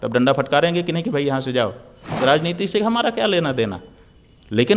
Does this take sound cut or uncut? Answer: cut